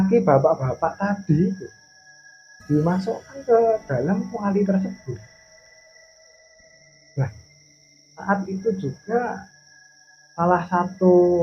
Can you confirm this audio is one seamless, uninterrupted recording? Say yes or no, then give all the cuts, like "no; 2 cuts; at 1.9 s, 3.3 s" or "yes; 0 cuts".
yes; 0 cuts